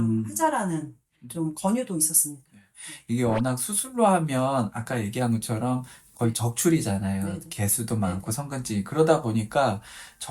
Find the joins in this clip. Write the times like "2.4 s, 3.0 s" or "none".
none